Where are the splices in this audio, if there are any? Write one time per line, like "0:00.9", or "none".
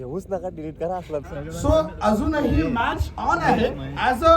0:01.4

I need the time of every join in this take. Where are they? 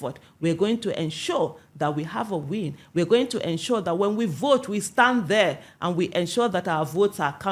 none

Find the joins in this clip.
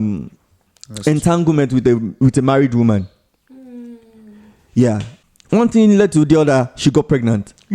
0:05.1

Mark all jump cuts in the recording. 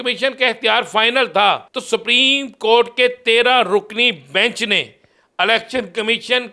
0:01.7

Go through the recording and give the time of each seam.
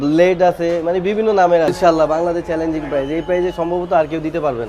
0:01.7

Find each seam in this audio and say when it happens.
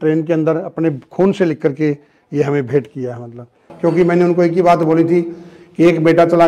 0:03.6

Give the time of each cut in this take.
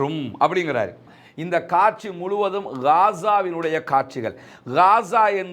0:01.1

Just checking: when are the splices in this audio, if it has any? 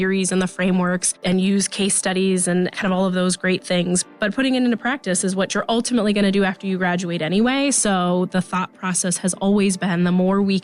none

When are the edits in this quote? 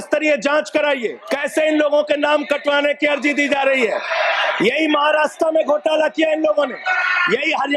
0:01.2

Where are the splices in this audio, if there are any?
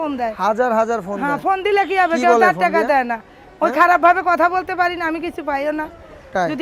none

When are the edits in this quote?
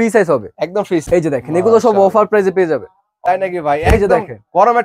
0:01.0
0:03.1

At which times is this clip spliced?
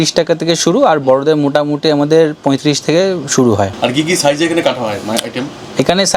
none

